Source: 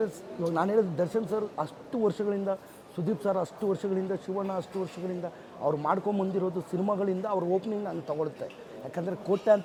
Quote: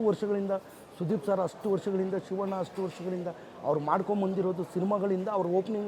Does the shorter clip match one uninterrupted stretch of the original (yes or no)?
yes